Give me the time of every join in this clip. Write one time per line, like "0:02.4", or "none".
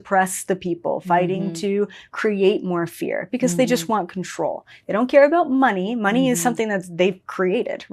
none

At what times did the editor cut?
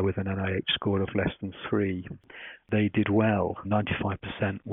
0:02.6
0:03.7

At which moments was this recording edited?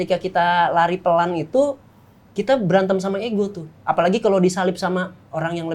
none

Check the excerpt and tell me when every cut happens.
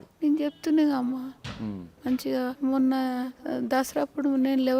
0:02.6
0:03.4

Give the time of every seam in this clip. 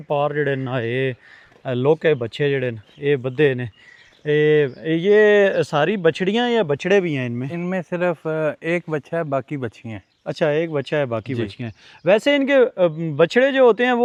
none

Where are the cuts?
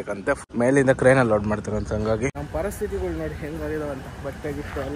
0:02.4

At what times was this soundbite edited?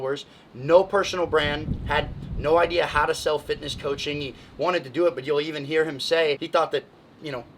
0:06.4

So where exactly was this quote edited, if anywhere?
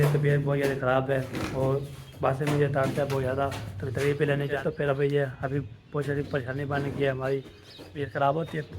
0:04.6

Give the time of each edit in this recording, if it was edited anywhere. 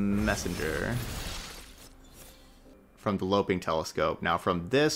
0:02.7

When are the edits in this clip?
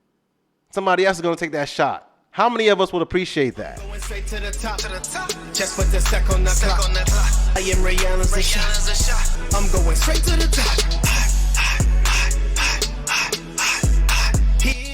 0:03.8

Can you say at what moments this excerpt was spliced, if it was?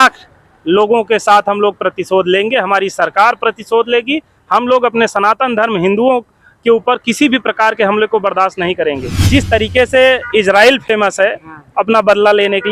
0:09.1

